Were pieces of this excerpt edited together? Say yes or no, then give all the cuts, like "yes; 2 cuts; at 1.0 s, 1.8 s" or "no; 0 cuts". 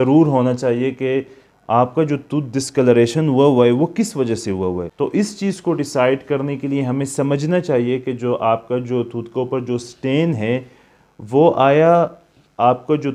yes; 1 cut; at 4.8 s